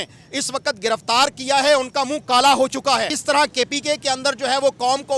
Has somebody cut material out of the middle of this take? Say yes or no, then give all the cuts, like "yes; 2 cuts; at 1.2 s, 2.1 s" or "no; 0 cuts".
yes; 1 cut; at 3.1 s